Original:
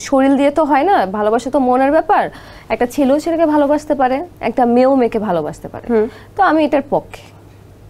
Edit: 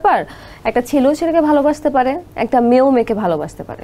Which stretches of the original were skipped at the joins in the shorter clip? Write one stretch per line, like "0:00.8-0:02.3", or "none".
none